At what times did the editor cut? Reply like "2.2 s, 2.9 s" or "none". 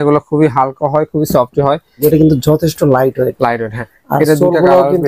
2.0 s